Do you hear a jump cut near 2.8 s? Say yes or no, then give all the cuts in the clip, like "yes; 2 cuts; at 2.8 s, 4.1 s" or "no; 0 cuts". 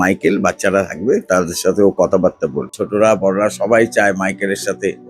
yes; 1 cut; at 2.8 s